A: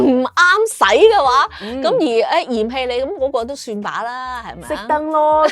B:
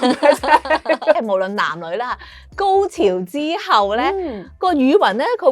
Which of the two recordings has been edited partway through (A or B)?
B